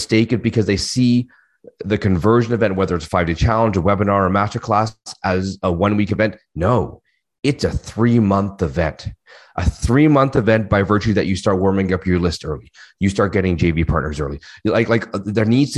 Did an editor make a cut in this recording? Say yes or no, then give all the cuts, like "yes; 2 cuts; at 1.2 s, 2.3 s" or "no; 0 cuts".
no; 0 cuts